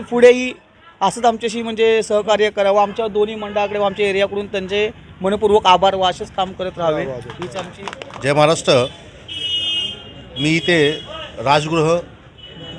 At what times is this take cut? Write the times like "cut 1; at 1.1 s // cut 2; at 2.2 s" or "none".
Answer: cut 1; at 7.8 s